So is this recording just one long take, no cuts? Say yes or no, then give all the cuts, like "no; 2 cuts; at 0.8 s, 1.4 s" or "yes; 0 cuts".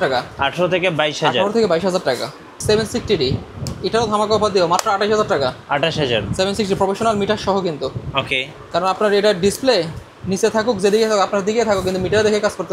no; 1 cut; at 2.5 s